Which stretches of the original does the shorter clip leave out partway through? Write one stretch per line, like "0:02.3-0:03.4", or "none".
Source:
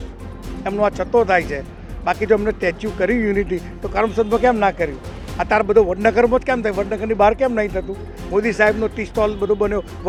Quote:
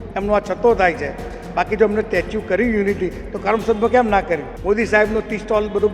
0:05.0-0:08.1